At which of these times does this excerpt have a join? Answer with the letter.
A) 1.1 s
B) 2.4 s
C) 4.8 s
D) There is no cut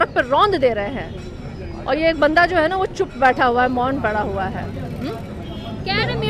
D